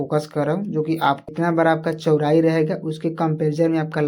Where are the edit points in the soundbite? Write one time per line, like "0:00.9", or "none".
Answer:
0:01.2